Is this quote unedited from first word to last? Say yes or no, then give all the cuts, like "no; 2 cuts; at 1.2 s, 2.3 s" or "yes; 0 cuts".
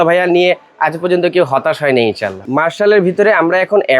no; 1 cut; at 2.5 s